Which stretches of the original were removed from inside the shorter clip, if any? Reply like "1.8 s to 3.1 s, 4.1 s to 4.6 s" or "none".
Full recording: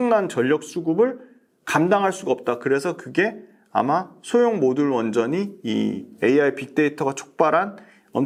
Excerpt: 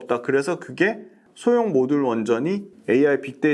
3.6 s to 4.1 s, 5.6 s to 6.1 s